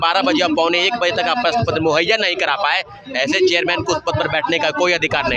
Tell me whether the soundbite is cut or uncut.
uncut